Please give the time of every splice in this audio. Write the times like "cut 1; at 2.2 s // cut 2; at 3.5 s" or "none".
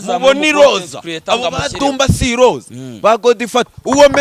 none